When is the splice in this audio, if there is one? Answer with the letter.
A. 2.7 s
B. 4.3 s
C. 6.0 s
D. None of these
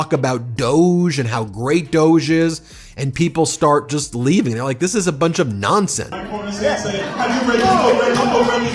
C